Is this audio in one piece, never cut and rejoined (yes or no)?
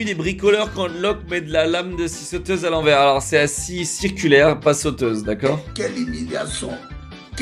yes